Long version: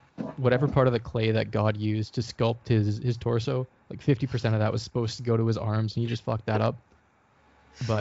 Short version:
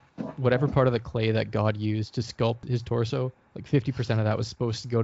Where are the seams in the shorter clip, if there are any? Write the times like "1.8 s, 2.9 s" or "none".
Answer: 2.6 s